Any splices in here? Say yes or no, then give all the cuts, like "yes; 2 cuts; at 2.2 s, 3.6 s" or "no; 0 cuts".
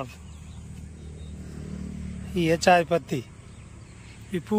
no; 0 cuts